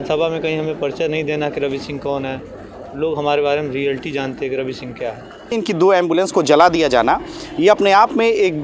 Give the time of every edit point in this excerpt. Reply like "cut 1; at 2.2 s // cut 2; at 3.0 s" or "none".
cut 1; at 5.5 s